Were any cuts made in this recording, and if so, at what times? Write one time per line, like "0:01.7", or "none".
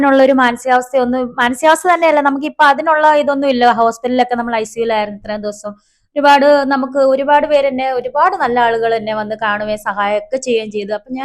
none

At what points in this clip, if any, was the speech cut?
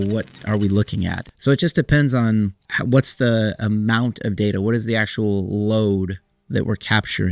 0:01.2
0:02.7

